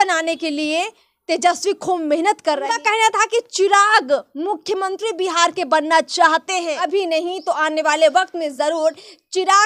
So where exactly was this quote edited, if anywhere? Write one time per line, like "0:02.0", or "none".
0:02.7
0:06.8

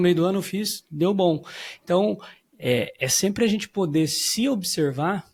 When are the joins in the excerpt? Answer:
none

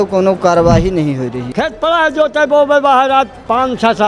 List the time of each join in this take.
0:01.4

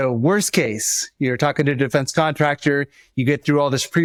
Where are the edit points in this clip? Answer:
none

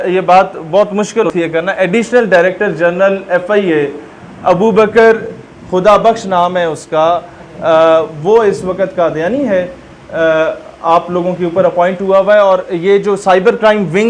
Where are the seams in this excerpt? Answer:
0:01.3

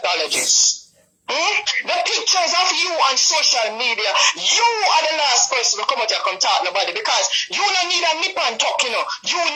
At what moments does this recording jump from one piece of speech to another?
none

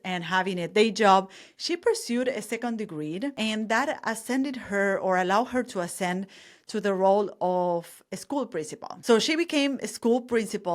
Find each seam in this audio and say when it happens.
0:03.3

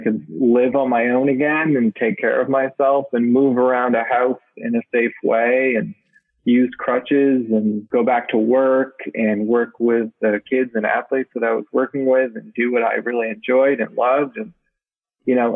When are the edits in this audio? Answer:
none

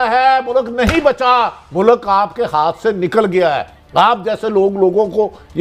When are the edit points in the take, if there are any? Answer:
none

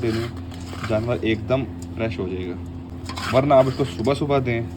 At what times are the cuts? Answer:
none

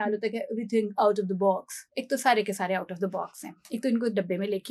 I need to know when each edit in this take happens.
none

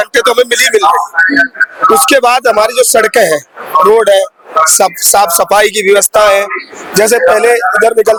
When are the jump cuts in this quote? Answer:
none

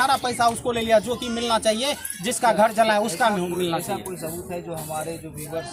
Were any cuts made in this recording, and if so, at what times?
none

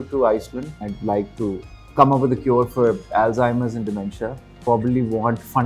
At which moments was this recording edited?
0:00.8
0:01.8
0:04.5

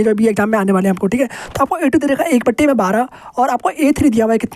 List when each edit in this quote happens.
none

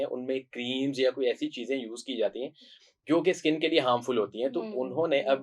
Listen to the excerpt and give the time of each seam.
none

